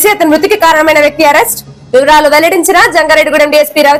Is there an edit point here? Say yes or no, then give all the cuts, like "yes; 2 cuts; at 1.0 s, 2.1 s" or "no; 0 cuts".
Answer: no; 0 cuts